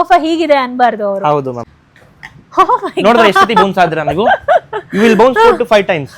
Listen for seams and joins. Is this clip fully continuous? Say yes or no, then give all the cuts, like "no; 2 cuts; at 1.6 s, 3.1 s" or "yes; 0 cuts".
no; 1 cut; at 1.7 s